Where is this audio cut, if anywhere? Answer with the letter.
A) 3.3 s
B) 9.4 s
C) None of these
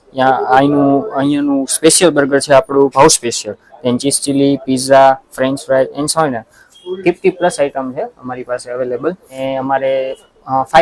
B